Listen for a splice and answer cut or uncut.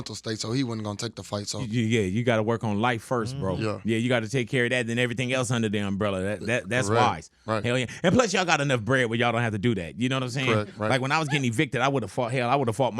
cut